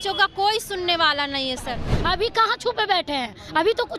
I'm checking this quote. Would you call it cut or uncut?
cut